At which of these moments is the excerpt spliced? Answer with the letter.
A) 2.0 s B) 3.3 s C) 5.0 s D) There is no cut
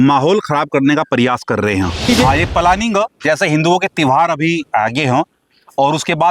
A